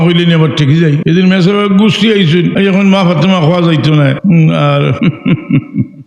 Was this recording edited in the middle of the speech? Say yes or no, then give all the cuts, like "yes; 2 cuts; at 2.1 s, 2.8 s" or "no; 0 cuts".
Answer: yes; 4 cuts; at 1.0 s, 2.5 s, 4.2 s, 5.0 s